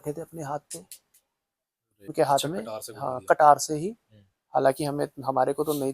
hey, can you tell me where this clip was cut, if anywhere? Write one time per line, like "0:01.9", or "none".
0:02.1